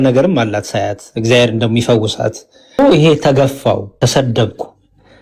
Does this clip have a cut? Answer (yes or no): yes